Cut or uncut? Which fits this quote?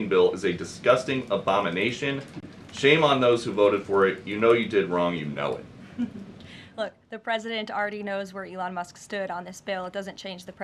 uncut